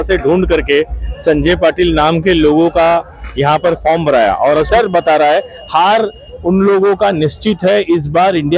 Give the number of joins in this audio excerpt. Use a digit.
1